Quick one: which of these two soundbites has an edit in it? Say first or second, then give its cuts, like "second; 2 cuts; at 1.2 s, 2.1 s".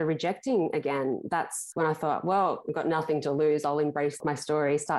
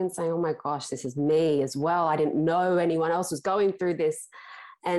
first; 2 cuts; at 1.6 s, 4.2 s